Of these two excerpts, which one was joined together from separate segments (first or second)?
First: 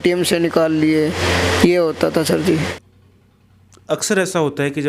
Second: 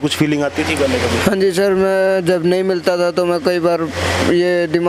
first